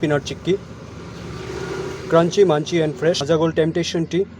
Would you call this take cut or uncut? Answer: cut